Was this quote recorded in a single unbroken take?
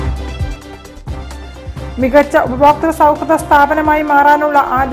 no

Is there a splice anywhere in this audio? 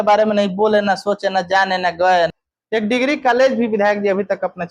yes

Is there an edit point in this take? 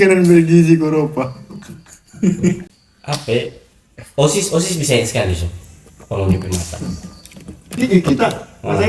yes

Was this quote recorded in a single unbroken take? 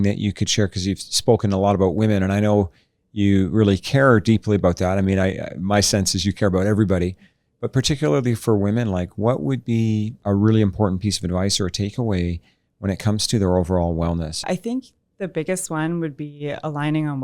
no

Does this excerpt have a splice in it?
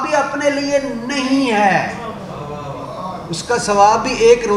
no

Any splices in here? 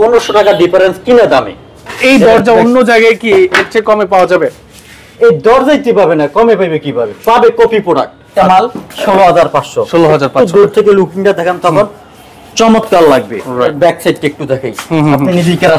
yes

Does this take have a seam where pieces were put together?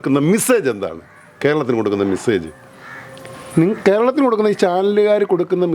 no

